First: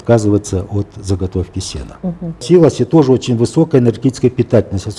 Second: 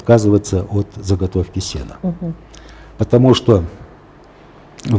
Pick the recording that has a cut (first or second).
first